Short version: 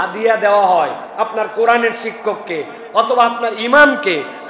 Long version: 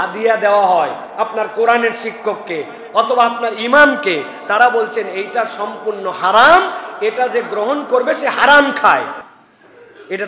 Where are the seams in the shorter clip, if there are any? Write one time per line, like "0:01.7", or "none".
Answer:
none